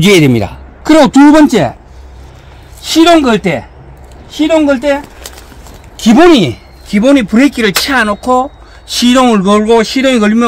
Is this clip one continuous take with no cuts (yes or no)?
yes